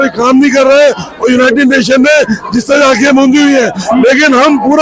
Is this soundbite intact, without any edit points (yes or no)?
yes